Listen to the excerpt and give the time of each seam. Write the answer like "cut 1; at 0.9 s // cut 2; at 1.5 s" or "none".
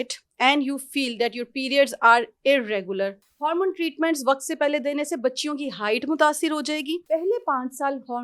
cut 1; at 3.2 s // cut 2; at 7.0 s